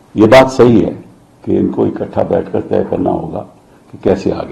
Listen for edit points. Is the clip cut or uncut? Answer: uncut